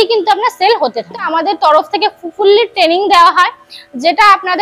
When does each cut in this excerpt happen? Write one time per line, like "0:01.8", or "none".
0:01.3